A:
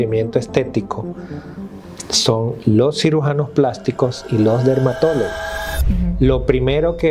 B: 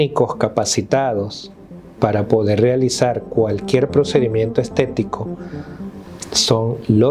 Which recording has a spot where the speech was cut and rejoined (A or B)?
A